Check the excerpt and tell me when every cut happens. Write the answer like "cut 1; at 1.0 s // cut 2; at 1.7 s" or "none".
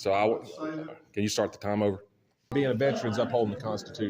cut 1; at 2.5 s

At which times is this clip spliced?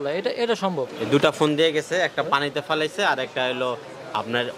cut 1; at 0.9 s

